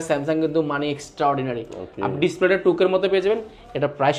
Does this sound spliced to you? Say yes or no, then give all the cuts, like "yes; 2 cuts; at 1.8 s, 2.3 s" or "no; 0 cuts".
no; 0 cuts